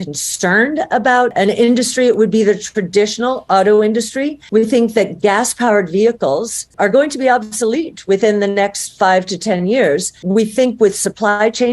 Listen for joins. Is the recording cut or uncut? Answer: cut